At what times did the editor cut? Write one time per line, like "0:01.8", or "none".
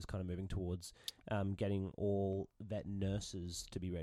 none